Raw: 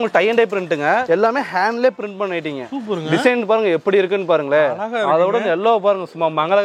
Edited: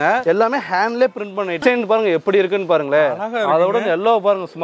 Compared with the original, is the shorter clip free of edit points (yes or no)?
no